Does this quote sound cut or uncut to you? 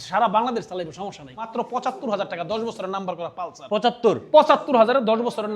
cut